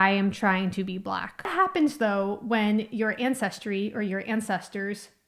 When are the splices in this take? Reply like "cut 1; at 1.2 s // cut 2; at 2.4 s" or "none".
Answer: cut 1; at 1.5 s